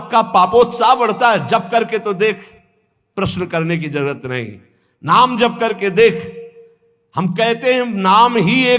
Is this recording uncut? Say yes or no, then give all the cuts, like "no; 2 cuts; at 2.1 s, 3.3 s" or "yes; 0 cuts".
yes; 0 cuts